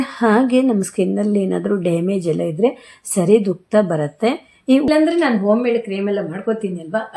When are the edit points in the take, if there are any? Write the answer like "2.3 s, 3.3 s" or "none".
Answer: 4.9 s